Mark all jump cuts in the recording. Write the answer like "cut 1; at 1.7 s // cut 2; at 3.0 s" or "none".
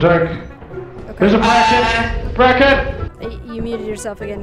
cut 1; at 3.1 s